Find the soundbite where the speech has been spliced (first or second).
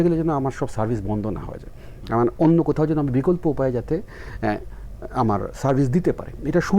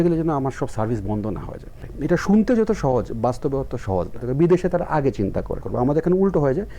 second